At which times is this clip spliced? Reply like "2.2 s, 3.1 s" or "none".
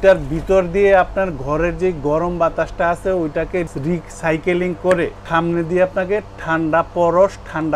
5.2 s